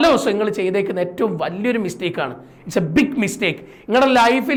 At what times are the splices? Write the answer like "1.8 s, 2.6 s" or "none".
none